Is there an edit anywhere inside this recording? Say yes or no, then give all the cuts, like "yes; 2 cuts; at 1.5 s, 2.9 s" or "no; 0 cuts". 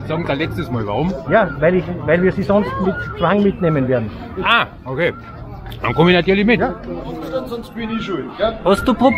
yes; 1 cut; at 7.6 s